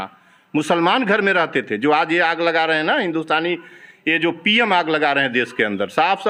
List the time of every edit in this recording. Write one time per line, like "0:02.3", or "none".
none